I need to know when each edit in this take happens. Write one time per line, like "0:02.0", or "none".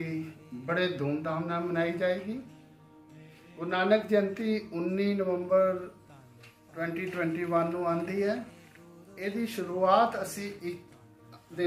none